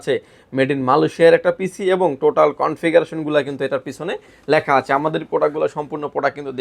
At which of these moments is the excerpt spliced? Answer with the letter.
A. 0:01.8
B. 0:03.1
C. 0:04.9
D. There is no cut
D